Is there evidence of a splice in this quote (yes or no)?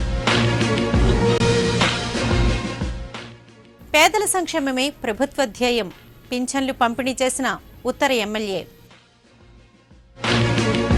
yes